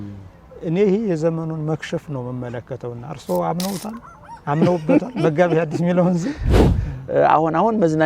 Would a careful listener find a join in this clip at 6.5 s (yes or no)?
yes